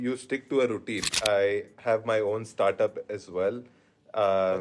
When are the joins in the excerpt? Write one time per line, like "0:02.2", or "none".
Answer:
0:01.1